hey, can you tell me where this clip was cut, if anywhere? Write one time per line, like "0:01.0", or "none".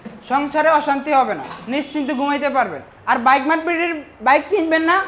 none